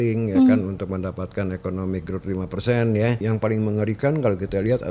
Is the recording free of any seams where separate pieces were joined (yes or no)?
no